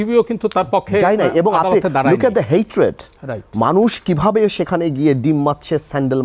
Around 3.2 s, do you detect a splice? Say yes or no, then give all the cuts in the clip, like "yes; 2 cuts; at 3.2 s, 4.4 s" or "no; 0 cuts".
no; 0 cuts